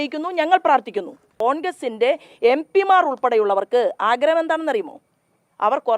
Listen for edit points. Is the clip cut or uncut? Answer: cut